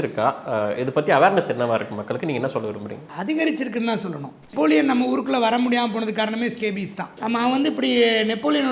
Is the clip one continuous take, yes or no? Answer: no